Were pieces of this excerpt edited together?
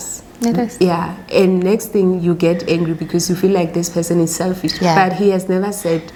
no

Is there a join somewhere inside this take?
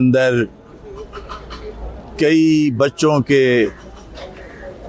no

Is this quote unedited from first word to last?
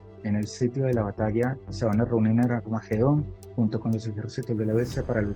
no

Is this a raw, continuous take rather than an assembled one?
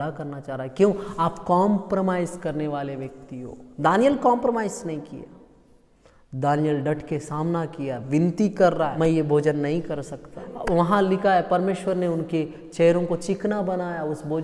no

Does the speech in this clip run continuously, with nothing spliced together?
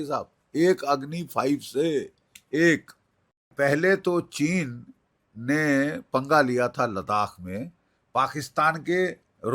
no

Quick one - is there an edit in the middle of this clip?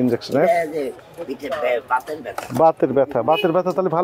yes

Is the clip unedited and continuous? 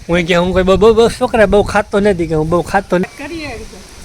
no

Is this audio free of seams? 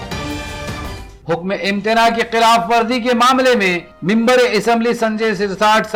yes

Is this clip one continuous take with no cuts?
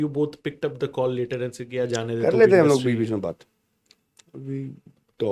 yes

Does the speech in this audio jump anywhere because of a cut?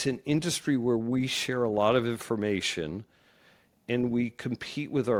no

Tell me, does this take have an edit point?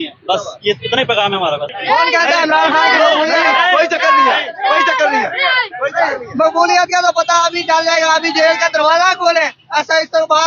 yes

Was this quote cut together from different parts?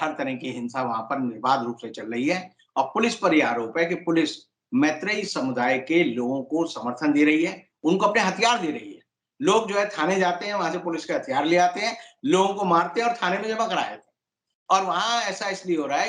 no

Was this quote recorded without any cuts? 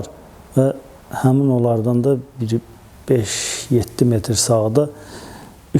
yes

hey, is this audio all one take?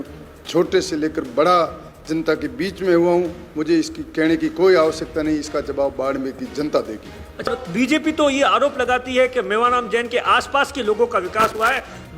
no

